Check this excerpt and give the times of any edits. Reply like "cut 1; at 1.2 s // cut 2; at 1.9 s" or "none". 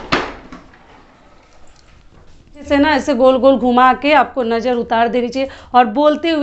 cut 1; at 2.6 s